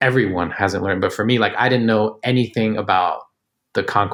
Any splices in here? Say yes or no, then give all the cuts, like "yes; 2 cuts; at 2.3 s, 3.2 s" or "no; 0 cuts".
no; 0 cuts